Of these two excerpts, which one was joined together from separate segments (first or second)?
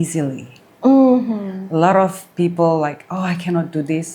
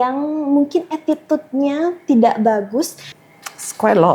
second